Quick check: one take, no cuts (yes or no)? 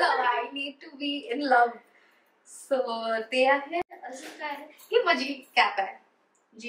yes